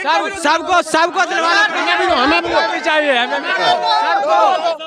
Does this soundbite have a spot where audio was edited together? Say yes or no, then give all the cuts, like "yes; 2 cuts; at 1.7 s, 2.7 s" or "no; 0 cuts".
no; 0 cuts